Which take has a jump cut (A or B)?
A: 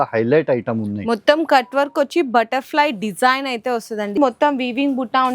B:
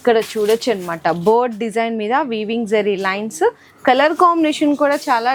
A